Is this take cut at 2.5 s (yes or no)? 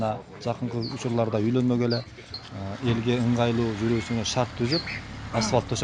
yes